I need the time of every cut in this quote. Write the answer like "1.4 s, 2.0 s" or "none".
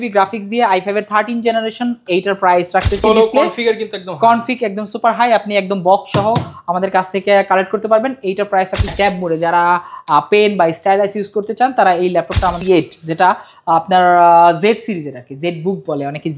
3.0 s, 8.9 s, 12.6 s

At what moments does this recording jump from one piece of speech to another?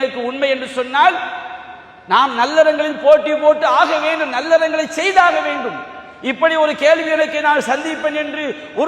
none

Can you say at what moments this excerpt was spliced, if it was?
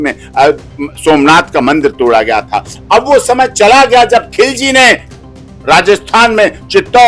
none

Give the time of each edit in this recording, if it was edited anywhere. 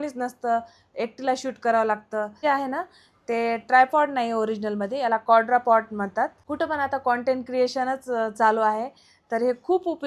2.3 s, 6.4 s

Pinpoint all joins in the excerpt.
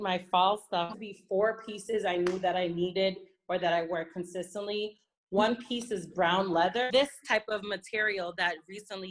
1.0 s, 6.9 s

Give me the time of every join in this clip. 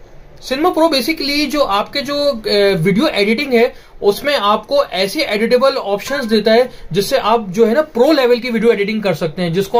none

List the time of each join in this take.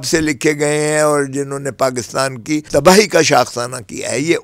2.7 s

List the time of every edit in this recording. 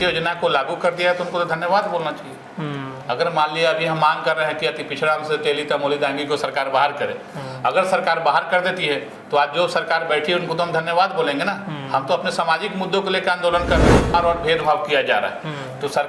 14.1 s

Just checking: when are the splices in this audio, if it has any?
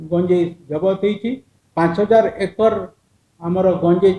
1.5 s

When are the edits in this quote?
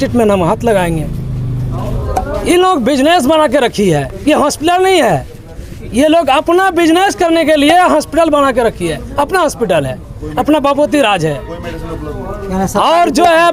none

